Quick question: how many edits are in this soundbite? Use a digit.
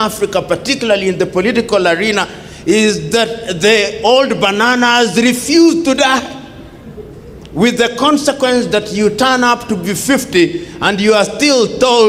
0